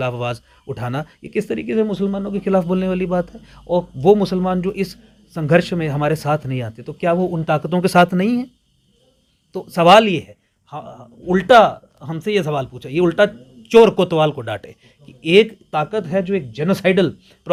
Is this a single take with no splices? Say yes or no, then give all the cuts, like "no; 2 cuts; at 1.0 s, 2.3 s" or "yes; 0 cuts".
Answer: yes; 0 cuts